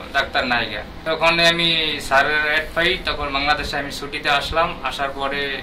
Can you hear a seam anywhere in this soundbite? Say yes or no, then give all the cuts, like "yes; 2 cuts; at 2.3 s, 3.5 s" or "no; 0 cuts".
yes; 1 cut; at 0.9 s